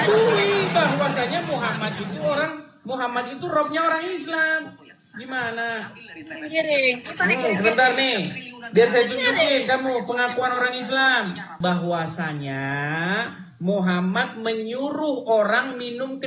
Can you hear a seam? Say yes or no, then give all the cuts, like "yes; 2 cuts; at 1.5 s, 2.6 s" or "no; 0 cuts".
yes; 1 cut; at 11.5 s